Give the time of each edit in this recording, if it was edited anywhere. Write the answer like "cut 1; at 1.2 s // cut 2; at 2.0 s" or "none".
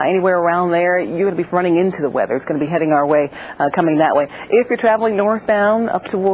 none